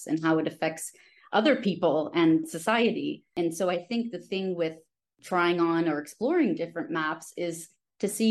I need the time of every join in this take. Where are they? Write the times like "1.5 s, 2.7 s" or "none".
3.3 s, 5.2 s